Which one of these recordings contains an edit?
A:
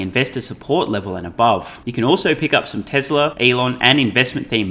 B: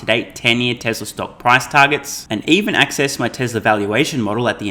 A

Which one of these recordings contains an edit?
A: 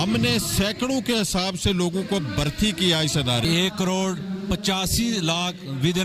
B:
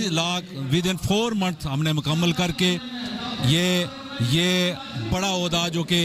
A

